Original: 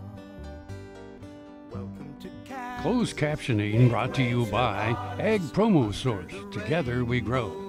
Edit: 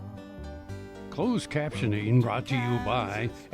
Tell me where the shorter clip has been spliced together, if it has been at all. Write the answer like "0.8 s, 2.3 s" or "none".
1.2 s